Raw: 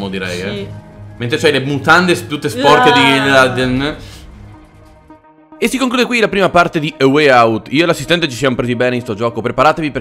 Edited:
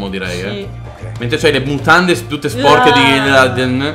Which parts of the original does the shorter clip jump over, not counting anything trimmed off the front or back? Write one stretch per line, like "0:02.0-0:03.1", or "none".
none